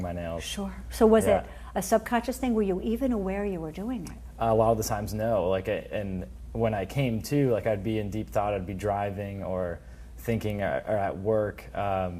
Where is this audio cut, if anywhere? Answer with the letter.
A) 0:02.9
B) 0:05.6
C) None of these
C